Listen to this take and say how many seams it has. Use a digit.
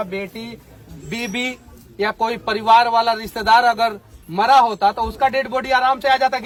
0